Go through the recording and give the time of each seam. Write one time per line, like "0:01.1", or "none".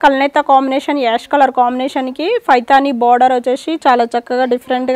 none